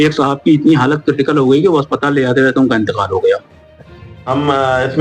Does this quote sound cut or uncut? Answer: cut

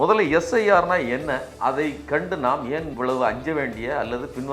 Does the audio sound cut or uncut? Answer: cut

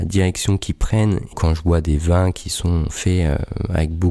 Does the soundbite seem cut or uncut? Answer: cut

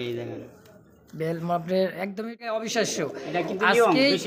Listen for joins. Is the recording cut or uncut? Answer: cut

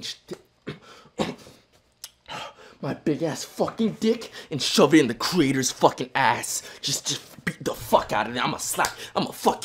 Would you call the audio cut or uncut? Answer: uncut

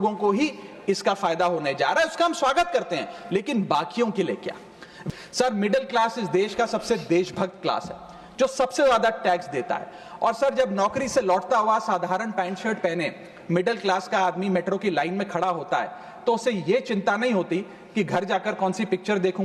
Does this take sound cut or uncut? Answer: cut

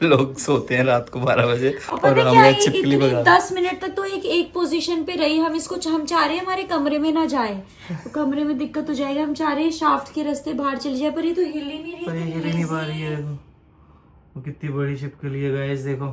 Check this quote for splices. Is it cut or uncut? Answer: uncut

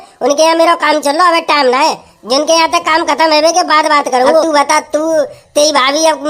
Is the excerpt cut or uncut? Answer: cut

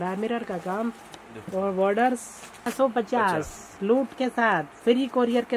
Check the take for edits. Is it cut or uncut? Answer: cut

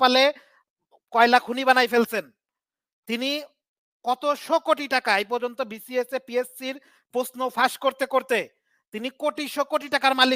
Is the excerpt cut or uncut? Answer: uncut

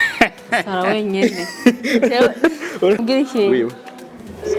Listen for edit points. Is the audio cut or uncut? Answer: cut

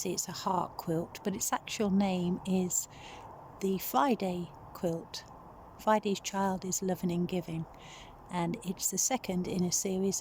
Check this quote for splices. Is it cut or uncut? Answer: uncut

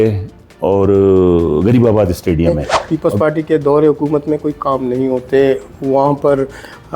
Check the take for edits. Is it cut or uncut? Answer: cut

